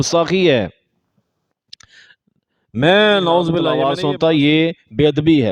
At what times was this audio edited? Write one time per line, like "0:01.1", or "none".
0:03.8